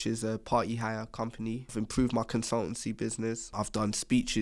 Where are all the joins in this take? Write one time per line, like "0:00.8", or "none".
0:01.7
0:03.5